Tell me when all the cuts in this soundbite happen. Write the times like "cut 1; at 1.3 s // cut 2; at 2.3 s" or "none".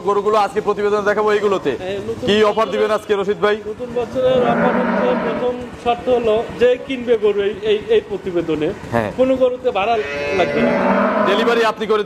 none